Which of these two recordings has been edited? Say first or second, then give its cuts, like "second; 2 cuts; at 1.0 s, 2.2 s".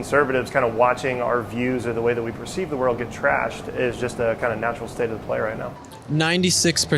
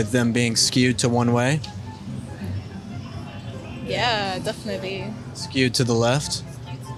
first; 1 cut; at 5.7 s